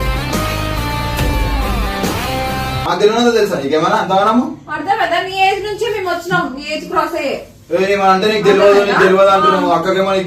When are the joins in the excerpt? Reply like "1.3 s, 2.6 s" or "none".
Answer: 2.7 s

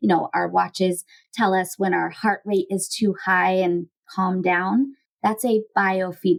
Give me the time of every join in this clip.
none

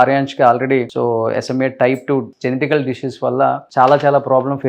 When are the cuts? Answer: 0.9 s, 2.3 s

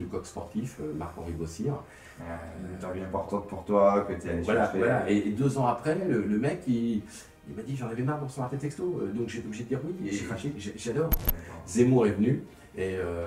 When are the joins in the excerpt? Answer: 11.3 s

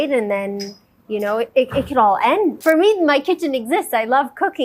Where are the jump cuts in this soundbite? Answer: 2.6 s

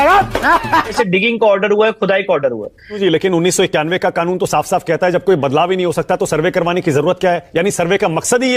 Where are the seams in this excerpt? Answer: 0.9 s, 3.0 s

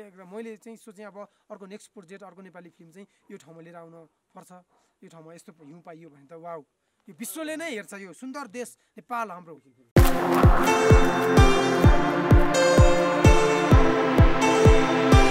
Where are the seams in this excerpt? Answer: 10.0 s

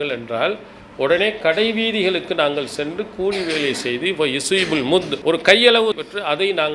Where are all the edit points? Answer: 5.1 s, 5.9 s

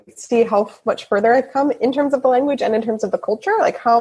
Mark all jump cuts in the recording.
none

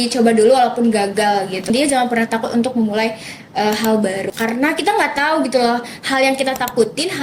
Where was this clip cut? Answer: 1.7 s, 4.3 s

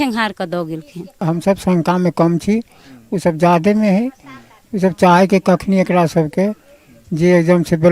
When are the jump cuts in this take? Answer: 1.2 s

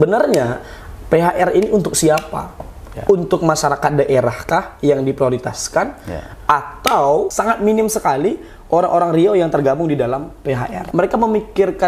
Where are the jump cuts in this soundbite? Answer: 7.3 s, 10.8 s

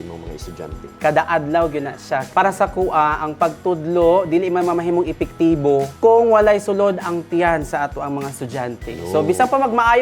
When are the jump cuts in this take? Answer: 0.9 s, 2.3 s, 5.9 s

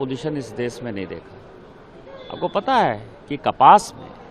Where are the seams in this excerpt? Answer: none

